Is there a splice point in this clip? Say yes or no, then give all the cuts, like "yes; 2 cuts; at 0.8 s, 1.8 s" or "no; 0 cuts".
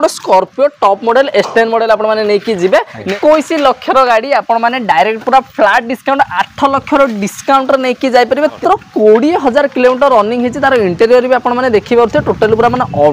yes; 2 cuts; at 3.1 s, 8.6 s